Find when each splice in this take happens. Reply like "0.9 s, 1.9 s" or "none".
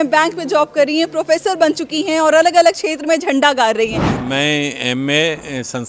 4.1 s